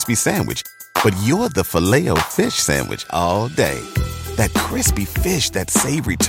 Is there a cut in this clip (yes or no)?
no